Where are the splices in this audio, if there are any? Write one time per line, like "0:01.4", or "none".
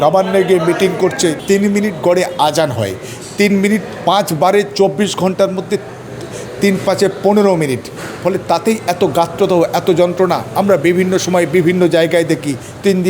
0:01.4